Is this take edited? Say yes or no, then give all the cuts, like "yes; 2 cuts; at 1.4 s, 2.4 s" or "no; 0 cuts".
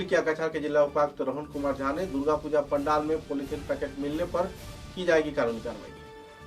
no; 0 cuts